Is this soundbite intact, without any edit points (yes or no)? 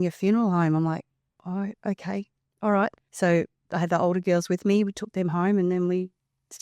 no